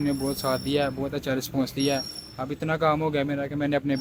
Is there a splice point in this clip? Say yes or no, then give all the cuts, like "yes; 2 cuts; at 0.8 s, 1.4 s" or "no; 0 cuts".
no; 0 cuts